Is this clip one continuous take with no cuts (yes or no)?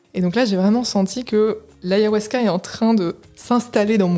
no